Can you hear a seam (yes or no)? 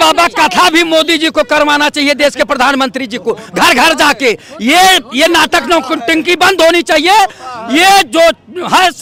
no